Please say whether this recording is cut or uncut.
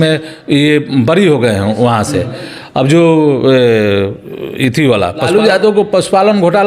cut